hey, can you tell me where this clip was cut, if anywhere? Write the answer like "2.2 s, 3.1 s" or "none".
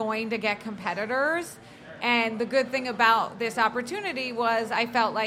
none